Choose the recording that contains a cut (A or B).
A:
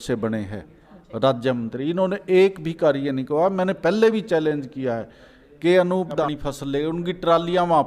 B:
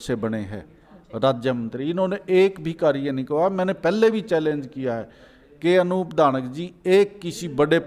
A